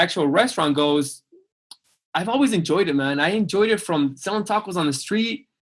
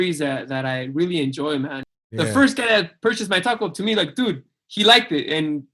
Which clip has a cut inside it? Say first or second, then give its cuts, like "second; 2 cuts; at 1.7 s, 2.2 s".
second; 1 cut; at 1.8 s